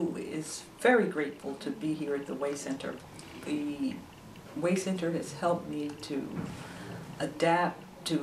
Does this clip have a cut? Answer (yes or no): no